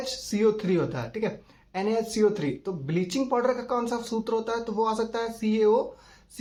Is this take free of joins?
yes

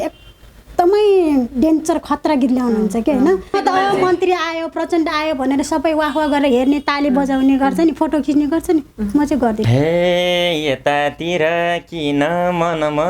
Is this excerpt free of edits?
no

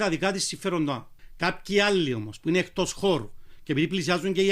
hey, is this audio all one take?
no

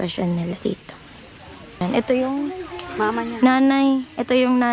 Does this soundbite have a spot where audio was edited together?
yes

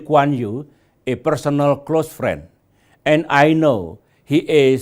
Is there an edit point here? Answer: yes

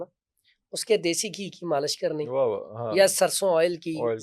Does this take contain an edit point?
no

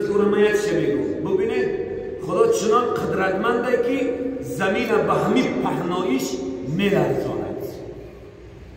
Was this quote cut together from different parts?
no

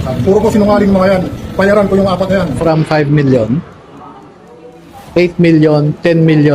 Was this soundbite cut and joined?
yes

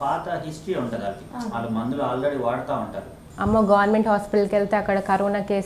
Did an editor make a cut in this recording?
yes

